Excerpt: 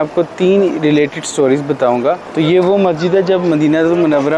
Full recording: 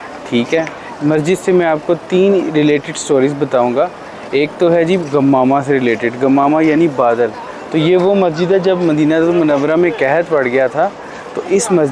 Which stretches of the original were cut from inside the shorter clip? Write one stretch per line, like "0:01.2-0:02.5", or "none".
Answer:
0:04.0-0:07.6